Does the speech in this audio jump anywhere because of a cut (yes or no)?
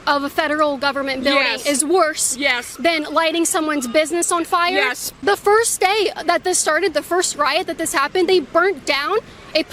yes